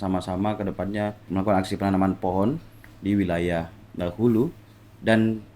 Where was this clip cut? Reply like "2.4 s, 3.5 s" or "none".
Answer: 1.3 s